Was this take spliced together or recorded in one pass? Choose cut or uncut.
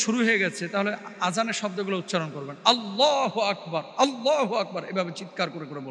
uncut